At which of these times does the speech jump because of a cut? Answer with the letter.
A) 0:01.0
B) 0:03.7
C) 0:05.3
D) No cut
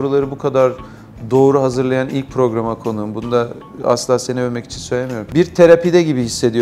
C